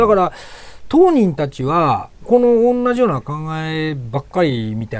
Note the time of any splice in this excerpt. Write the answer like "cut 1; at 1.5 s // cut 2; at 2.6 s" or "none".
cut 1; at 2.2 s